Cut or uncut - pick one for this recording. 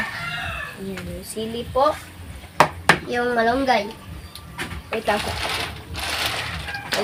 uncut